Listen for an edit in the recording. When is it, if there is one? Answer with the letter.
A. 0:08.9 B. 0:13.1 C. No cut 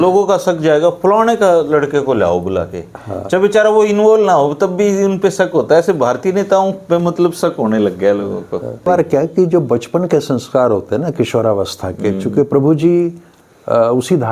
A